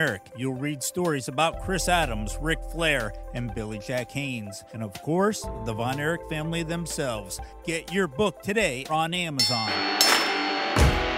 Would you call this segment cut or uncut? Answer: cut